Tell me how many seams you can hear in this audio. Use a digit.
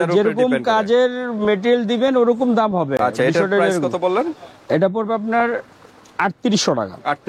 0